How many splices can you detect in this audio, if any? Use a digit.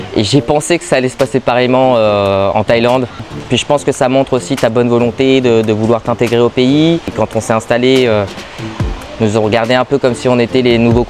2